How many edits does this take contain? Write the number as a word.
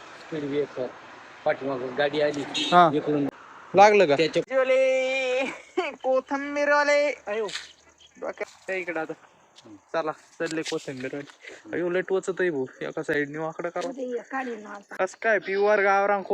two